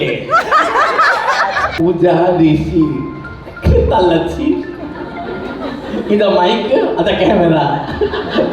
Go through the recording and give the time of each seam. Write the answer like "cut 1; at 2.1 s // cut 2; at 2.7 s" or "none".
cut 1; at 1.8 s